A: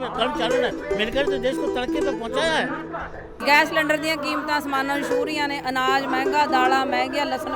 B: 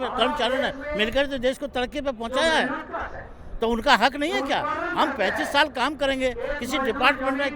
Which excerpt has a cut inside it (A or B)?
A